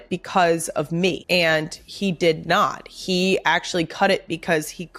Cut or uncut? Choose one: cut